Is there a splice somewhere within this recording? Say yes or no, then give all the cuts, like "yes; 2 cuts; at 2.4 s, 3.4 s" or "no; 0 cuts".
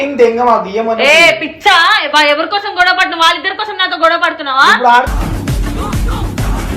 no; 0 cuts